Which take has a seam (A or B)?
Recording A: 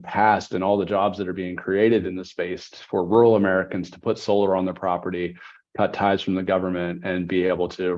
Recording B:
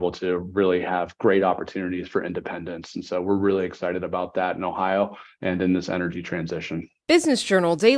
B